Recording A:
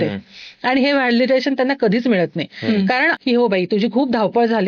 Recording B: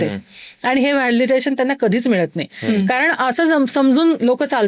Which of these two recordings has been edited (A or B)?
A